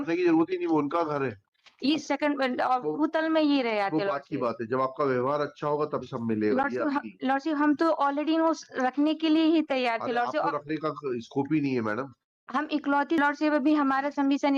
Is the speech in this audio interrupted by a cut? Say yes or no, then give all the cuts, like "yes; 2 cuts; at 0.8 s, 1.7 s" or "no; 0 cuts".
yes; 2 cuts; at 2.0 s, 13.2 s